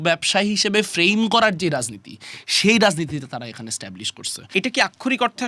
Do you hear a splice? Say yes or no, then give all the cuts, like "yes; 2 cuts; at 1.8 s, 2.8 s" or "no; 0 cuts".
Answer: yes; 1 cut; at 4.4 s